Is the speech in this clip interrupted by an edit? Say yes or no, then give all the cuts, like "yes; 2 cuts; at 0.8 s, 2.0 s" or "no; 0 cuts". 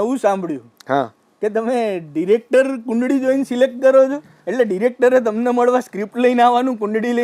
no; 0 cuts